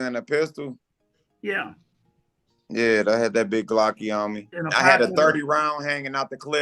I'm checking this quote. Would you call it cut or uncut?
cut